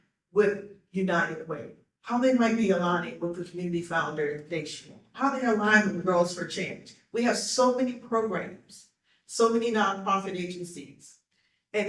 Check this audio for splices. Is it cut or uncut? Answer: uncut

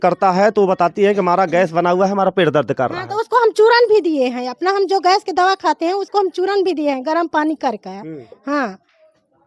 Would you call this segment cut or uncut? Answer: uncut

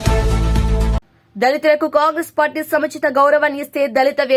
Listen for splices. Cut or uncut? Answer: cut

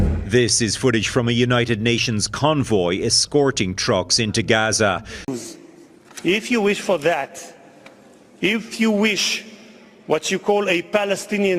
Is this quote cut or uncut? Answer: cut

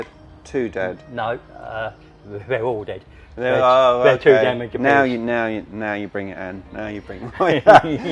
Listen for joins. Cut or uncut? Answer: uncut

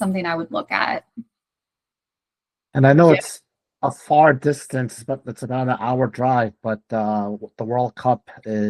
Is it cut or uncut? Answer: uncut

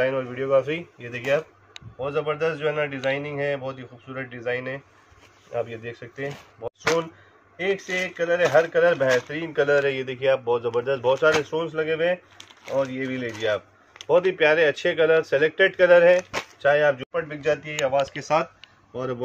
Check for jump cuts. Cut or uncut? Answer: cut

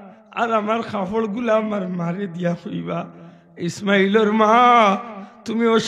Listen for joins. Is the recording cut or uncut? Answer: uncut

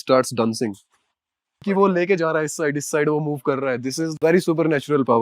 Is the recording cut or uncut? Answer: cut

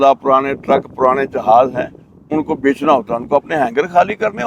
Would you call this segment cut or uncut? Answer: uncut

